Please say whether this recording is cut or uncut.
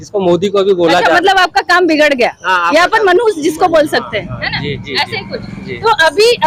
uncut